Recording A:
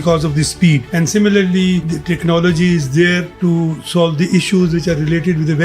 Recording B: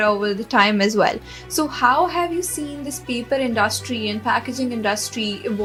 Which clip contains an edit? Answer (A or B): A